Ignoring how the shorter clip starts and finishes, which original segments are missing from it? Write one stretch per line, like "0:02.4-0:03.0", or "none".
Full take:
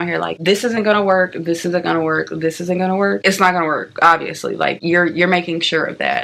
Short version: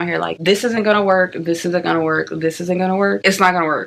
none